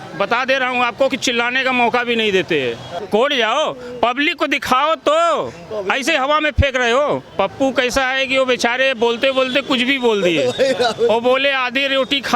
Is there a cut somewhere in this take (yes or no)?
yes